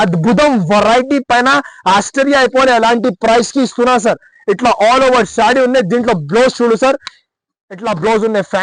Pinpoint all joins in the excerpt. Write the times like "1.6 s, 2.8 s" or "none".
none